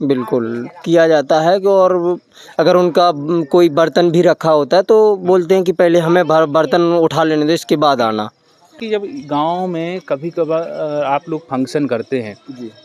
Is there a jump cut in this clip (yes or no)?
yes